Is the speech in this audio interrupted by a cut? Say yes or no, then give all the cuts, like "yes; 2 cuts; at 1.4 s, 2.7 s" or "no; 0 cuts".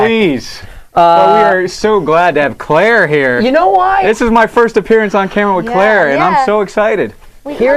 yes; 1 cut; at 2.7 s